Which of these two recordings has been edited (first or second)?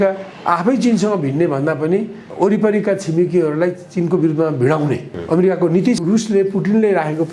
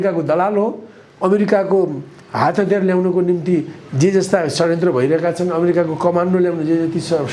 first